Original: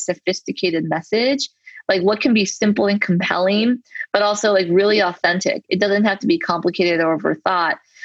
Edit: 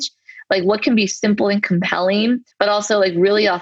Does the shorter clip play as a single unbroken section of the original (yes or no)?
no